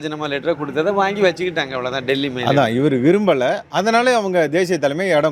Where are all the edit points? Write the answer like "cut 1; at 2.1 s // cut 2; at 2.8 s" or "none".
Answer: none